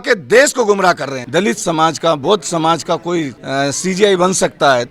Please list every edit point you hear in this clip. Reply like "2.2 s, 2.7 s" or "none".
1.1 s, 3.4 s